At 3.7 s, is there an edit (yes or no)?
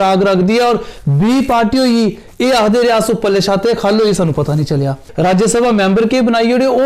no